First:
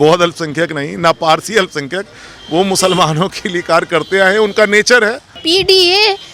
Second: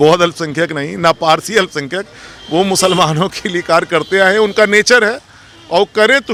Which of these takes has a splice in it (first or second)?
first